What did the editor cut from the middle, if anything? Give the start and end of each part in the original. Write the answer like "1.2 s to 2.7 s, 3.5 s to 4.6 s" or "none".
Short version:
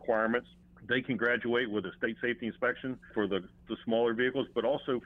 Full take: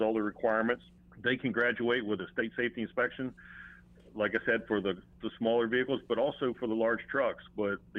3.5 s to 4.6 s